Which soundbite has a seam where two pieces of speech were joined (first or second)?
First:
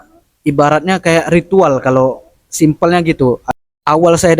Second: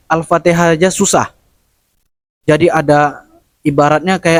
first